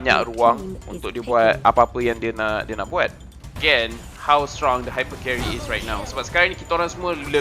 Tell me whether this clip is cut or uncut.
cut